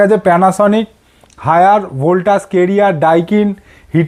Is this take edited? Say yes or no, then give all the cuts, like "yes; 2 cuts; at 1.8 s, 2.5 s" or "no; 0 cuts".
no; 0 cuts